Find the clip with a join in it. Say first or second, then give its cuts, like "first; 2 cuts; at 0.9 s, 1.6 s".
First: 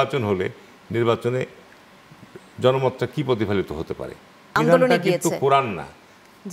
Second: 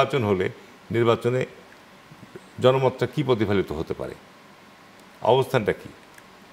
first; 1 cut; at 4.6 s